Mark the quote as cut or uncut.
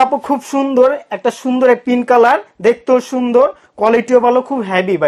uncut